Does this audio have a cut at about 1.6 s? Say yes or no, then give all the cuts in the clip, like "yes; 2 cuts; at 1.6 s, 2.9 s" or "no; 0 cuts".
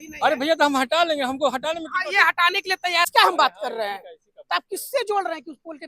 no; 1 cut; at 3.1 s